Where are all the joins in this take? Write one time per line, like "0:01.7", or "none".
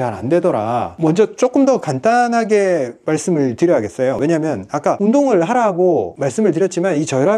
0:00.9